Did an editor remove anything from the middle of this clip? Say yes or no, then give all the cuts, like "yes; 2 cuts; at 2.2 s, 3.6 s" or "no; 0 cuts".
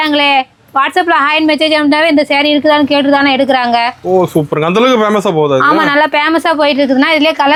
no; 0 cuts